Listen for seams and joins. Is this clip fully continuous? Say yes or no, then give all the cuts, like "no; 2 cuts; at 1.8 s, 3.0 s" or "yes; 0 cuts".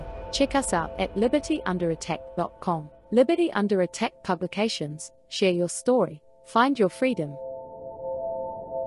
no; 2 cuts; at 2.9 s, 7.4 s